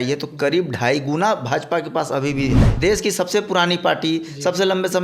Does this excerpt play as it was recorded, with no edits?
no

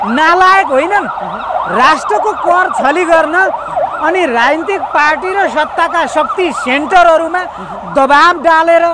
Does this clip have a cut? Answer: no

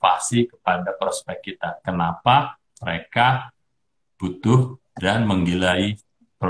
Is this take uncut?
yes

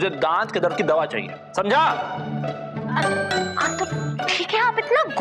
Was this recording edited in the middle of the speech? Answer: no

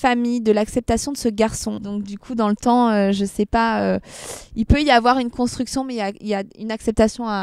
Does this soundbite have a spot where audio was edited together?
no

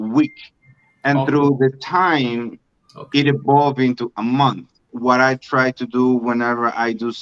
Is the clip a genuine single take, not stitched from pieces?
no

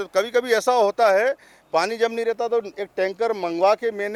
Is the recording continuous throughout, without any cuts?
yes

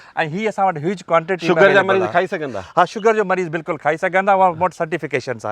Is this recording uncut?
yes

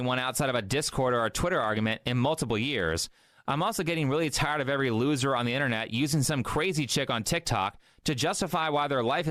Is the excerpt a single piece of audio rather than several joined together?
yes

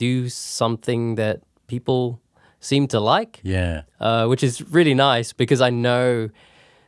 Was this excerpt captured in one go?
yes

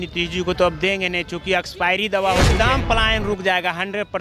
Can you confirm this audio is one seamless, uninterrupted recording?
no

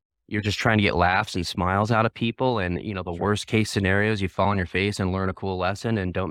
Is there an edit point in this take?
no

